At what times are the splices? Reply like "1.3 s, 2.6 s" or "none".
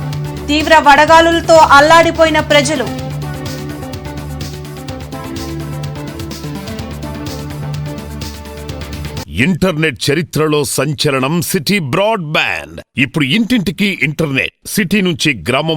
9.2 s